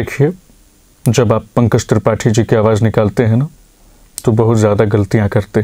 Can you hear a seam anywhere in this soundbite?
no; 0 cuts

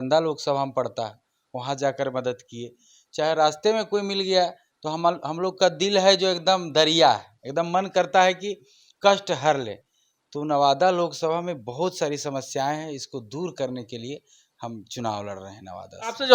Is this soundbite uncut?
yes; 0 cuts

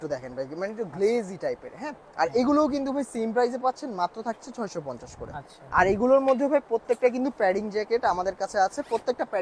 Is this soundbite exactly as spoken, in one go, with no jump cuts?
yes; 0 cuts

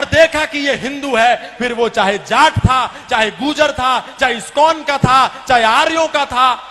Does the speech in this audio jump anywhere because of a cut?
no; 0 cuts

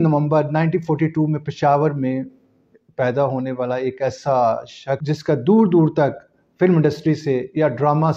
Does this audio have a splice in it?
no; 0 cuts

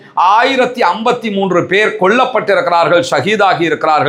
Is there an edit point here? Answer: no; 0 cuts

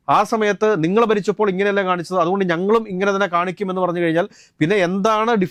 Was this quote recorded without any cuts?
yes; 0 cuts

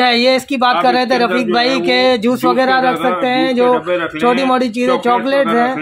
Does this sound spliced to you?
no; 0 cuts

